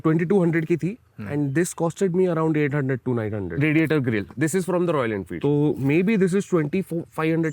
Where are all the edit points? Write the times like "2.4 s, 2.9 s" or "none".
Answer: 3.5 s, 5.3 s